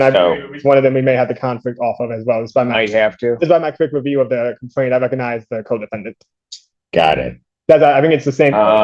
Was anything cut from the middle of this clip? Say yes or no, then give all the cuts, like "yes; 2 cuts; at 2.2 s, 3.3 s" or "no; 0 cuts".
no; 0 cuts